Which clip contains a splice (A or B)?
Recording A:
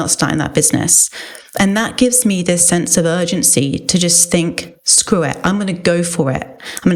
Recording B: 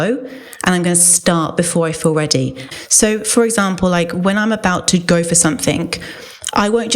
B